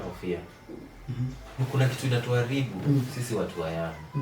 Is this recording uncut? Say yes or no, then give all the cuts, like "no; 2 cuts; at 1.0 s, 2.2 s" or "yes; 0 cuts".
no; 1 cut; at 1.6 s